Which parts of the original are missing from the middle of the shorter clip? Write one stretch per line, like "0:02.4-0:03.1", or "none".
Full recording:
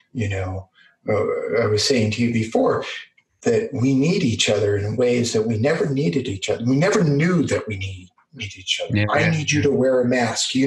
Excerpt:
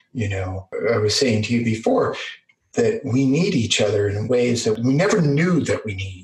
0:00.7-0:01.4
0:05.5-0:06.6